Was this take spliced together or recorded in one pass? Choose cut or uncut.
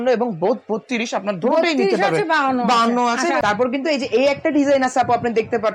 cut